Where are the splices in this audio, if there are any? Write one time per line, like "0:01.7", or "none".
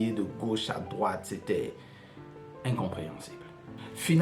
none